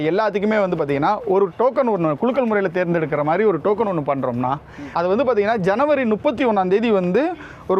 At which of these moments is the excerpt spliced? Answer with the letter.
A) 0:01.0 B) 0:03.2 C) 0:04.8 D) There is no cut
C